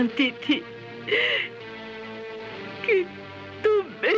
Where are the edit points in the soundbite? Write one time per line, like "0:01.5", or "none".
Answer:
none